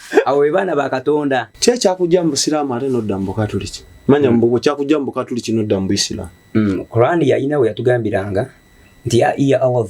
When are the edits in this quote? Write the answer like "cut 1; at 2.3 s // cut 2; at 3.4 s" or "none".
cut 1; at 1.5 s